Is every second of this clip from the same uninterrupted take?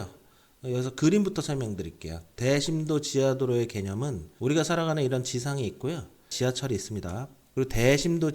yes; 0 cuts

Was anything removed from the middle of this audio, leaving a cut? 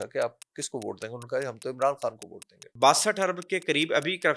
yes; 1 cut; at 2.7 s

